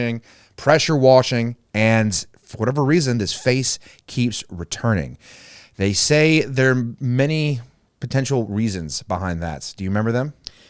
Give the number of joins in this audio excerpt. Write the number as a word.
zero